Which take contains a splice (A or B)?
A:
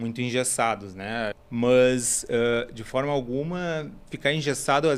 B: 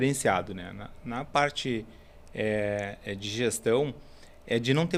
A